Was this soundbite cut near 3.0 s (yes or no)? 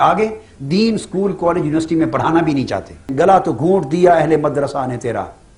yes